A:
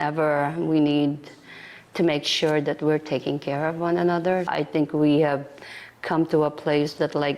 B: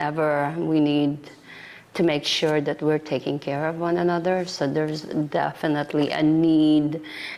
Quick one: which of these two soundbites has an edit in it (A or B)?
A